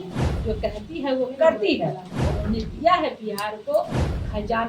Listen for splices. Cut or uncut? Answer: uncut